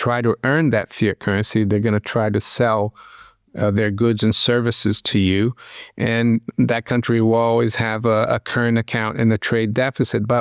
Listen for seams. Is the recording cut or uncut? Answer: uncut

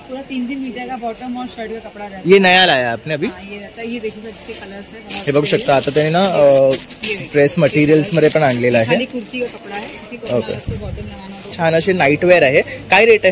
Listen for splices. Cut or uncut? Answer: cut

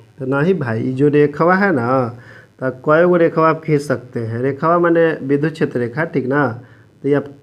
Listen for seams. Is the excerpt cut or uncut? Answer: uncut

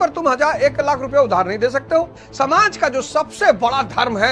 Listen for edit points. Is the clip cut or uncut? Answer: cut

